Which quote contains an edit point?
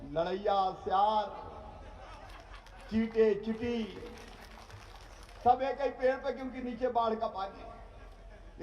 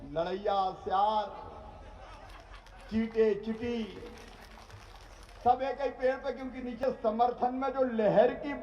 second; 1 cut; at 6.8 s

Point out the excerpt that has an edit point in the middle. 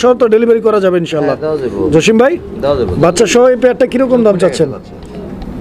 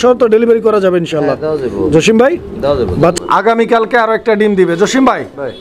second; 1 cut; at 3.1 s

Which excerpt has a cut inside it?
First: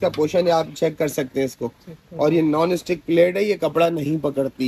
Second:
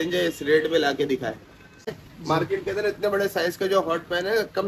second; 1 cut; at 1.9 s

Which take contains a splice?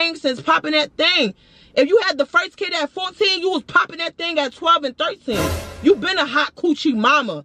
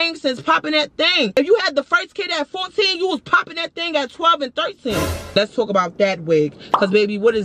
second; 2 cuts; at 1.4 s, 5.4 s

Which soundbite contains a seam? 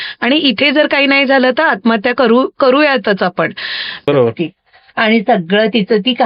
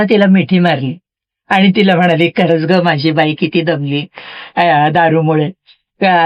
first; 1 cut; at 4.1 s

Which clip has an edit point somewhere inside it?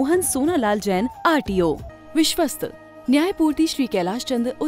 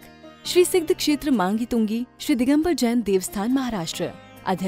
first; 1 cut; at 1.9 s

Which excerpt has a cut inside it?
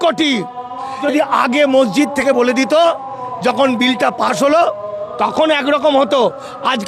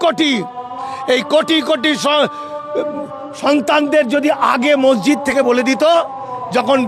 first; 1 cut; at 1.0 s

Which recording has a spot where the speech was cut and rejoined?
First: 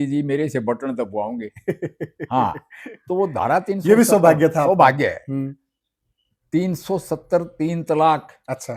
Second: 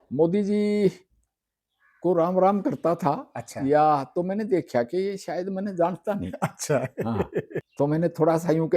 second; 1 cut; at 7.7 s

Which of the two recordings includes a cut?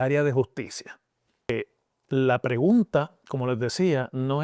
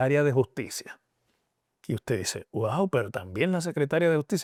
first; 1 cut; at 1.5 s

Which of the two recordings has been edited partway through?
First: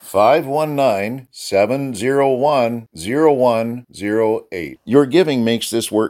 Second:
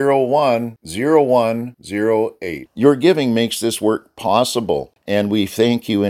second; 1 cut; at 4.9 s

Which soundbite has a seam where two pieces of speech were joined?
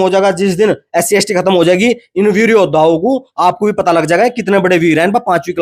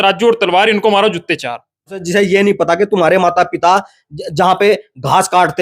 second; 1 cut; at 2.0 s

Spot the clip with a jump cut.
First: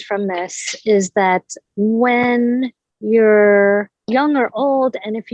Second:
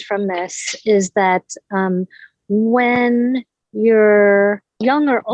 first; 1 cut; at 1.6 s

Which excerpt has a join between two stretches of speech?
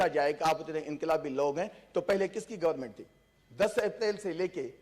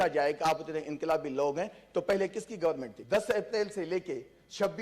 second; 1 cut; at 2.9 s

